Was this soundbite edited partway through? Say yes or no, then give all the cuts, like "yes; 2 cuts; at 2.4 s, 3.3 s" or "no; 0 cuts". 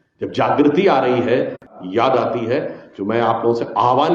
no; 0 cuts